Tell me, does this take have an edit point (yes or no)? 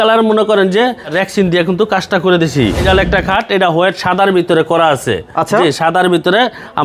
yes